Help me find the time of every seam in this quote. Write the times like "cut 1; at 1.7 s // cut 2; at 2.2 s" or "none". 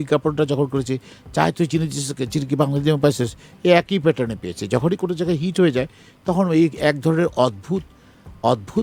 none

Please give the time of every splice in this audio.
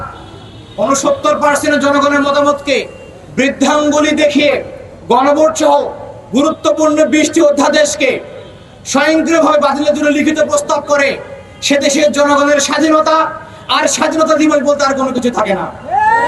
none

